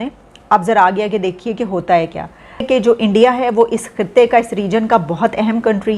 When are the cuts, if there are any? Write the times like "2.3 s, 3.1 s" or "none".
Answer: 2.7 s